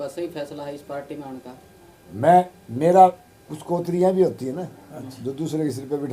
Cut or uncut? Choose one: cut